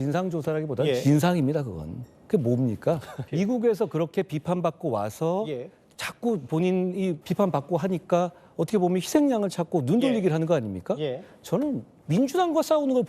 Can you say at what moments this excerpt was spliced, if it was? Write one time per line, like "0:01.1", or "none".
0:03.2
0:07.2
0:11.9